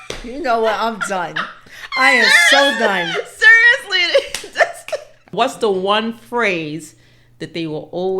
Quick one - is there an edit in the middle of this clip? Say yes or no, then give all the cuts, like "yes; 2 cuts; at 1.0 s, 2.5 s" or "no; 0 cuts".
yes; 1 cut; at 5.2 s